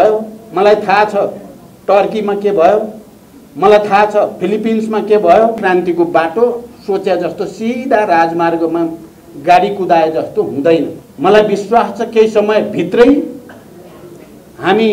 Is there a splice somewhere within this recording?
yes; 2 cuts; at 5.6 s, 11.0 s

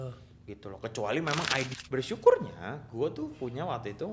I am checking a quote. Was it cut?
yes; 1 cut; at 1.7 s

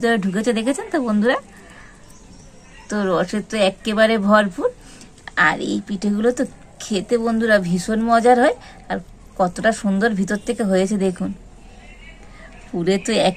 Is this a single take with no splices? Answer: yes; 0 cuts

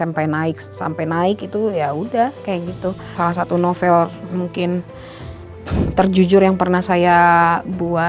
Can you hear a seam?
yes; 1 cut; at 3.1 s

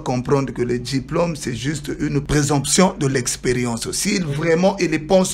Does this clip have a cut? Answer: yes; 1 cut; at 2.3 s

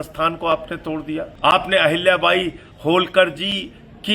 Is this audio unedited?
no; 1 cut; at 1.3 s

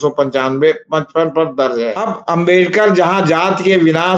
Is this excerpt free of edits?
no; 1 cut; at 2.0 s

